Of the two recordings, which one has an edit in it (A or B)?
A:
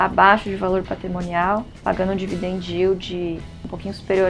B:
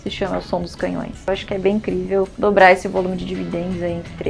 B